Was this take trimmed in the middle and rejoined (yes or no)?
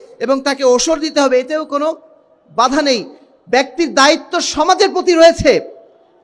no